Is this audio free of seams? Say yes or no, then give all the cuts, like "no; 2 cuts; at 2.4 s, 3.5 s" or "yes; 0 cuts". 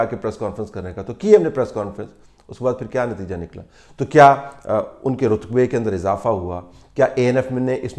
yes; 0 cuts